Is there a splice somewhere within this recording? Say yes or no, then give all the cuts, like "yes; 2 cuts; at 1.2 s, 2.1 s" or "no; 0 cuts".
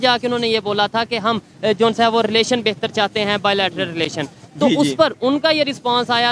no; 0 cuts